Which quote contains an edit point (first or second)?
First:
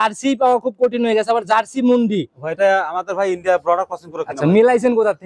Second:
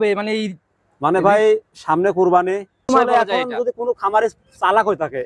second